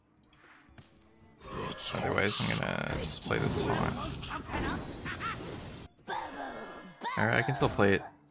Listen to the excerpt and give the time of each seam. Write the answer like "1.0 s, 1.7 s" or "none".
5.9 s

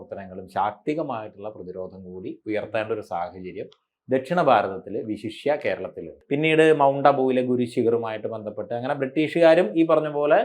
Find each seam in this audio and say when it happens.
6.1 s

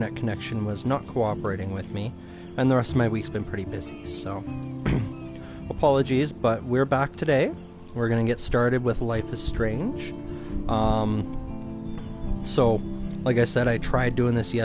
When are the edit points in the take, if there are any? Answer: none

